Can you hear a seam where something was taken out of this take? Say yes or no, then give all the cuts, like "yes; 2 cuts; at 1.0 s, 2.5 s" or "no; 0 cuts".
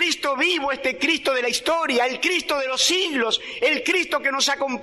no; 0 cuts